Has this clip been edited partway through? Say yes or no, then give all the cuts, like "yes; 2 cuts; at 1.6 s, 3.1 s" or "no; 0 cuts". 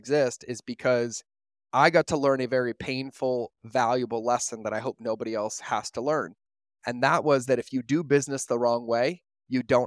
no; 0 cuts